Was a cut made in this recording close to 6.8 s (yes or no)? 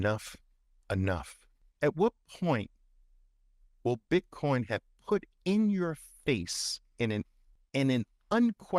no